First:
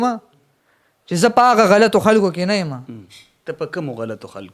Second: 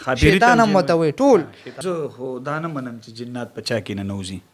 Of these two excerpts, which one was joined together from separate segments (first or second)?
second